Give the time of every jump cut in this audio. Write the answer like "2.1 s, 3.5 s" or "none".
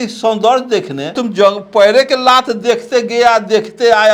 1.0 s